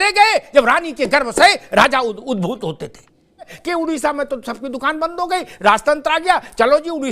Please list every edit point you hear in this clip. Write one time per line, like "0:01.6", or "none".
0:03.6

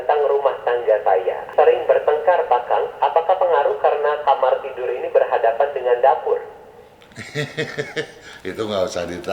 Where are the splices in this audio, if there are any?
0:01.4
0:04.2

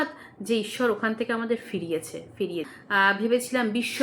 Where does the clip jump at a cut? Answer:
0:02.7

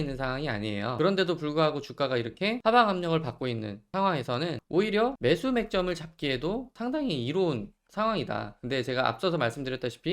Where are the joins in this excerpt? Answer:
0:00.9
0:02.6
0:03.8
0:04.6
0:05.2
0:06.7

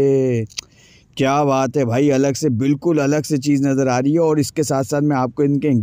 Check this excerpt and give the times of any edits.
none

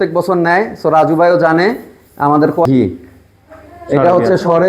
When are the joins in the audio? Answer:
0:02.6

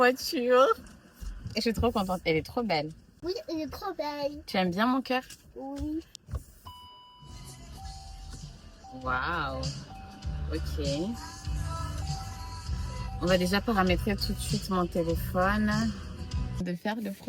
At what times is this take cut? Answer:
none

